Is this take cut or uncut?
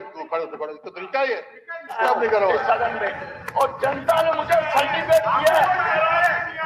cut